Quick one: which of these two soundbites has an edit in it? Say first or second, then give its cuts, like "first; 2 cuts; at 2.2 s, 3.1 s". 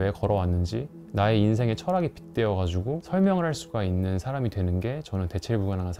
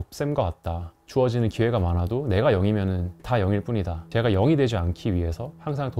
second; 2 cuts; at 0.9 s, 3.2 s